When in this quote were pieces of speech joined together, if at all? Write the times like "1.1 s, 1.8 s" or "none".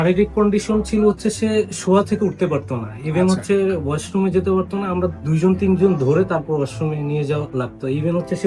none